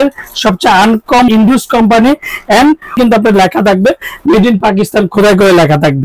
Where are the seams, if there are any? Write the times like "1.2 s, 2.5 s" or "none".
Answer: 1.3 s, 3.0 s

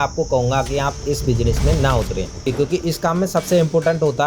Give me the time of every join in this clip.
2.4 s

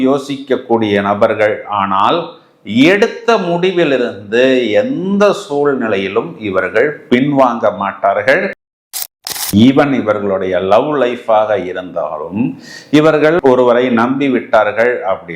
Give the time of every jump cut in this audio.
8.9 s

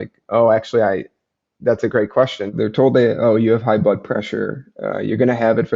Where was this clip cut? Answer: 2.5 s

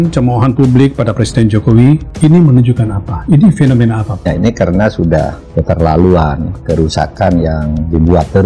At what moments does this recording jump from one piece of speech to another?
4.3 s

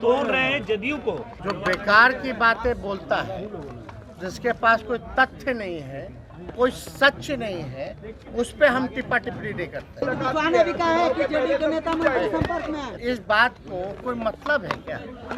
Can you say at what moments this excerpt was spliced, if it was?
1.3 s, 10.0 s, 12.9 s

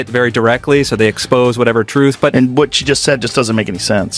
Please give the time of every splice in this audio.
2.3 s

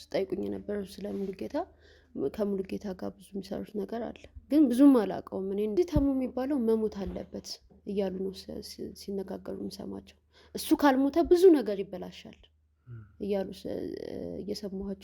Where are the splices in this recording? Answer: 5.7 s

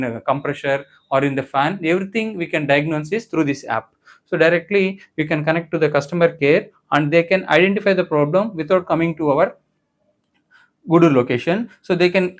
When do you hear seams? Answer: none

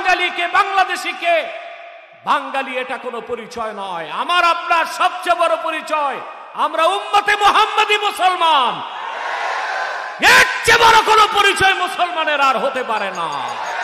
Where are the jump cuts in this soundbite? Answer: none

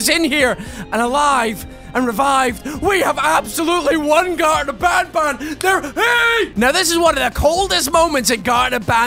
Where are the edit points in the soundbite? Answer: 6.5 s

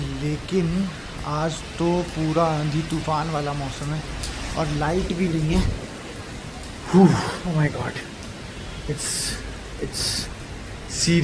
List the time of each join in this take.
none

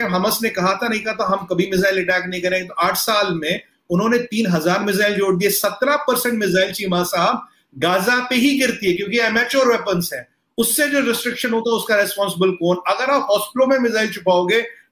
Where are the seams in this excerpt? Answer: none

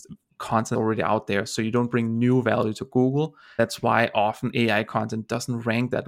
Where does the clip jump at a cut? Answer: 0.7 s, 3.4 s

